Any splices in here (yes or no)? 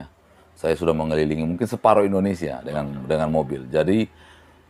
no